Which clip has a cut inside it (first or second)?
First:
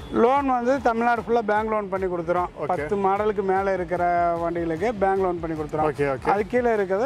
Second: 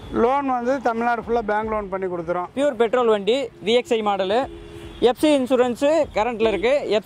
second